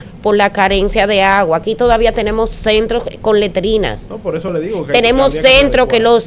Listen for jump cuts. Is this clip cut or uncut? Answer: uncut